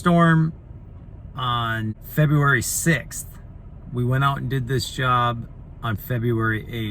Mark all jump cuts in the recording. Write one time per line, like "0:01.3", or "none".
0:02.0